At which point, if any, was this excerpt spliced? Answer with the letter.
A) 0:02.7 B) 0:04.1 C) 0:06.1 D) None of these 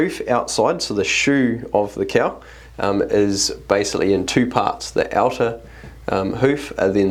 D